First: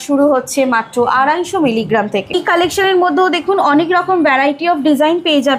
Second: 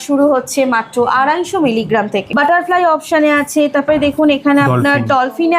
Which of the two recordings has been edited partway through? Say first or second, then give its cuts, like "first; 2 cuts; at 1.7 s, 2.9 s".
second; 1 cut; at 2.3 s